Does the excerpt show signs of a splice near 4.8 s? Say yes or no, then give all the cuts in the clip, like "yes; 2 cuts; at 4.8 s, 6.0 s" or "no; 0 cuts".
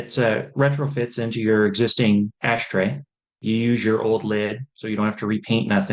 no; 1 cut; at 3.4 s